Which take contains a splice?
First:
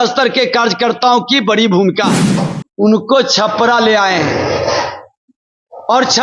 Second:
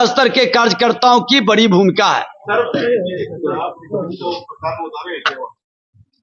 first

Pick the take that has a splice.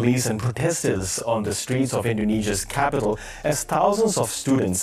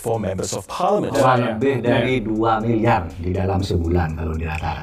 second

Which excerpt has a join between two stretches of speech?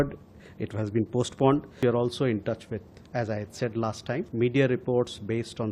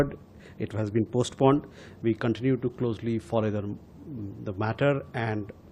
first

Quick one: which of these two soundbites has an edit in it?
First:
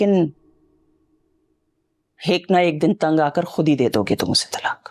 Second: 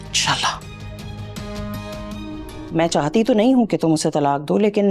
second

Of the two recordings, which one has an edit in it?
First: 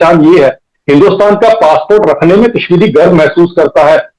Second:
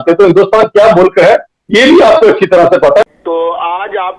second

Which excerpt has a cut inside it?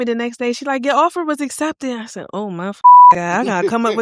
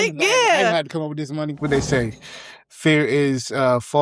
second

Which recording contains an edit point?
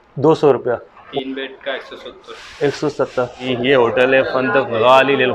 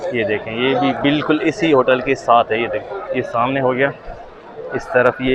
first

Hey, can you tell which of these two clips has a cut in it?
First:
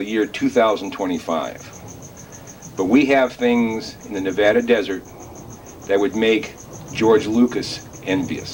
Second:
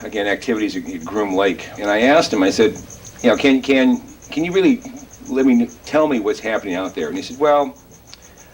second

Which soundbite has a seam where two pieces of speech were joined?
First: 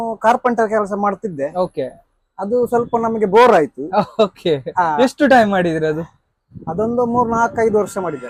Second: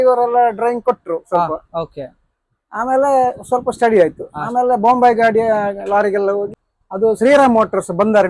second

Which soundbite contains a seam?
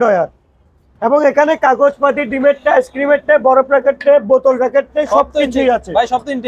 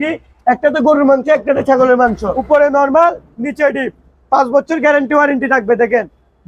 second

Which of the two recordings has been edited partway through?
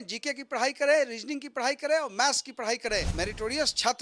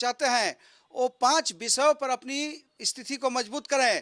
first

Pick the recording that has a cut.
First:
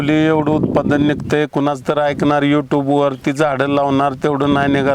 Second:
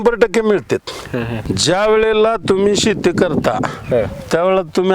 second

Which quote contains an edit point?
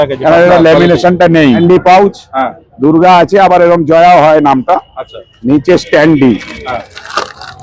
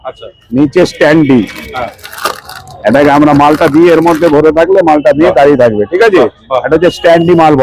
first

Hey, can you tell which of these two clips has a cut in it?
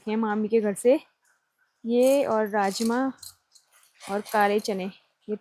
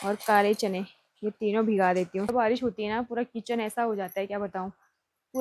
second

